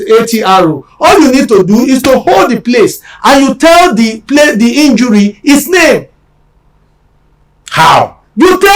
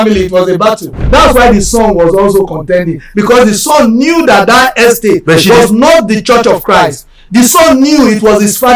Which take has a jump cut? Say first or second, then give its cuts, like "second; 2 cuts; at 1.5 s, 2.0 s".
second; 1 cut; at 0.9 s